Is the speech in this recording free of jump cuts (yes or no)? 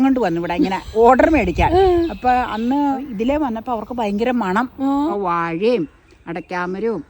no